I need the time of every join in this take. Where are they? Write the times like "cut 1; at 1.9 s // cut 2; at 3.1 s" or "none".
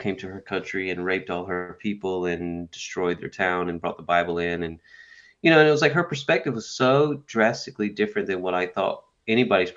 none